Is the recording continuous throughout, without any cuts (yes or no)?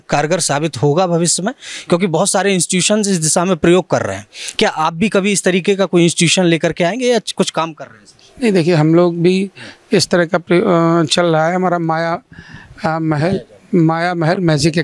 yes